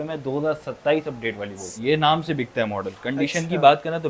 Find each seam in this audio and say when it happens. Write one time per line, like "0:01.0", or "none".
0:01.8